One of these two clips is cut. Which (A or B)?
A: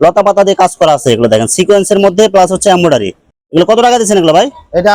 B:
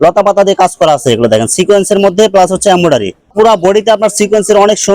B